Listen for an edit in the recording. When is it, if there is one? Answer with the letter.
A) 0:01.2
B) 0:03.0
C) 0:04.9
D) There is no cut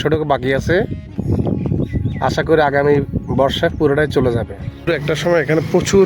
C